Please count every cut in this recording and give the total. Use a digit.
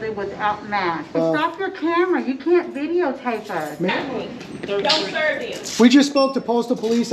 2